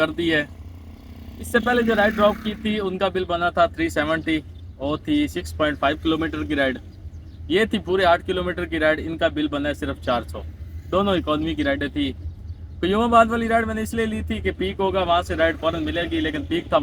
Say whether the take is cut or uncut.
uncut